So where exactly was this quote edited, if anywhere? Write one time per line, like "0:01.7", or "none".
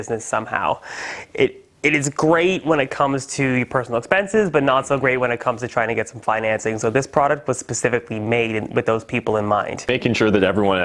0:09.9